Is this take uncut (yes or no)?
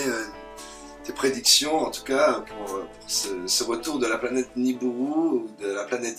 no